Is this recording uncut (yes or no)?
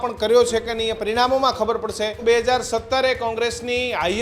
no